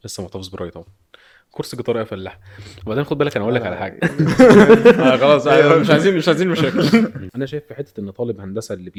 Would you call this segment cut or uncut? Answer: uncut